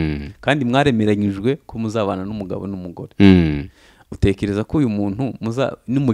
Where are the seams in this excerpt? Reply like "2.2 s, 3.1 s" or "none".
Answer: none